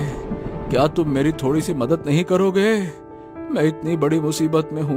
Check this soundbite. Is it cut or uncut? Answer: uncut